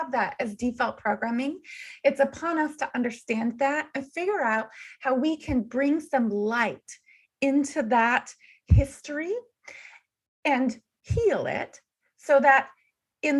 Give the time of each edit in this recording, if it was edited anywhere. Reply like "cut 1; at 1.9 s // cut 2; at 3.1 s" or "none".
none